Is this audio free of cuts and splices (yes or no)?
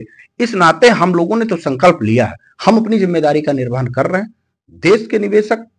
yes